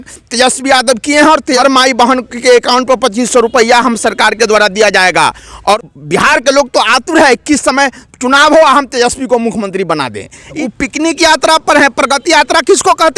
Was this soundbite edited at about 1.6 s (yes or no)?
yes